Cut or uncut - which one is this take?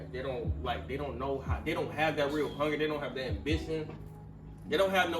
uncut